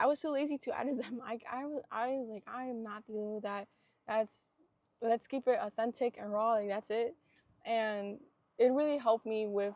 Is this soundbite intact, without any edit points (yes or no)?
yes